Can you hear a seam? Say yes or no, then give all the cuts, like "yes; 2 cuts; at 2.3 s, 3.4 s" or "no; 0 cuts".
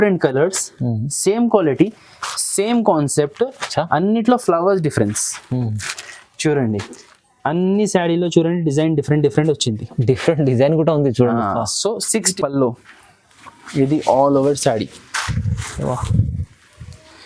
yes; 1 cut; at 12.3 s